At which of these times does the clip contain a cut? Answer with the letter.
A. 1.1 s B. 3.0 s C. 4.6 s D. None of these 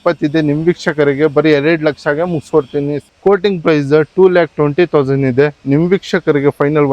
B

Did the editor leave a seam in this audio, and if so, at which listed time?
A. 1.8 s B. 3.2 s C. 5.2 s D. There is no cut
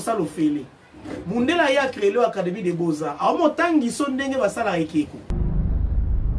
C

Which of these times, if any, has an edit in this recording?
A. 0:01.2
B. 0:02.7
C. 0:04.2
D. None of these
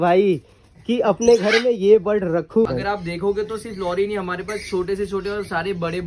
B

